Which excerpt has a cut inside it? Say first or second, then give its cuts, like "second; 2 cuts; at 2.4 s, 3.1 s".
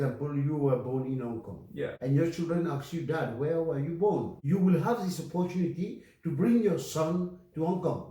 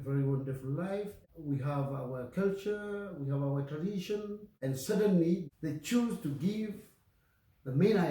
second; 2 cuts; at 1.2 s, 4.5 s